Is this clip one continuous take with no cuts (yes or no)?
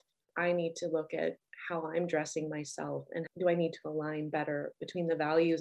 yes